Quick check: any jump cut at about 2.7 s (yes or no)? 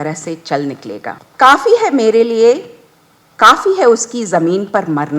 no